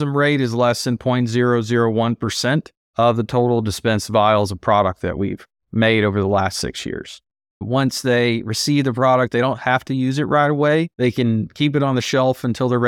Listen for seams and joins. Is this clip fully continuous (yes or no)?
no